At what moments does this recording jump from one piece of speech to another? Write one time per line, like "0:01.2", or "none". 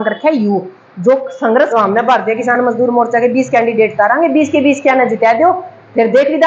0:01.7